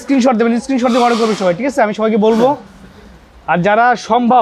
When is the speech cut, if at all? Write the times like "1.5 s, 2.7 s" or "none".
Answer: none